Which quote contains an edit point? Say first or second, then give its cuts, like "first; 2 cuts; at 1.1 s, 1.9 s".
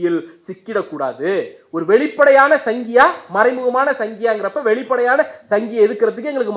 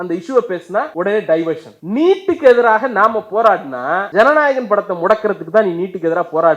second; 3 cuts; at 0.9 s, 1.7 s, 4.1 s